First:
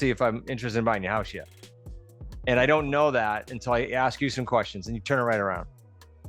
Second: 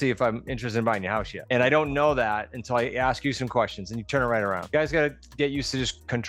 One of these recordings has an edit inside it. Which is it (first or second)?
second